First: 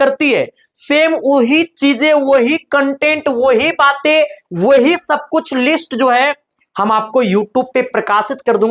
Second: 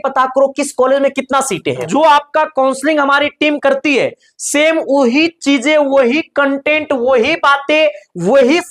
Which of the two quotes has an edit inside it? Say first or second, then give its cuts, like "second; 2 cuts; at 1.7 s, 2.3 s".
second; 1 cut; at 1.9 s